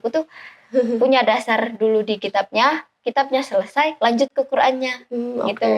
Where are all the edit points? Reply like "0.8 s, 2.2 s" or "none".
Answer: none